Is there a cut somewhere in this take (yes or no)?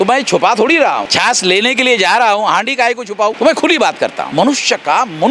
yes